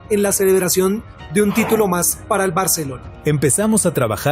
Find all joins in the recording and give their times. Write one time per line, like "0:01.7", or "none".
0:03.1